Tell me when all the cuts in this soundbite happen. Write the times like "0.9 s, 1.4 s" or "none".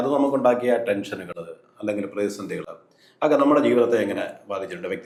none